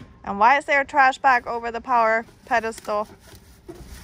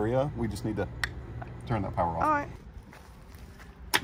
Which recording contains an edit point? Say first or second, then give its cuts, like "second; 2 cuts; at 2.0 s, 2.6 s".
second; 2 cuts; at 1.4 s, 2.6 s